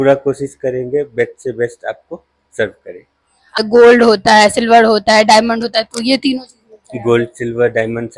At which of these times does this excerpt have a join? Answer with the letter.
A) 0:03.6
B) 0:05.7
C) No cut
A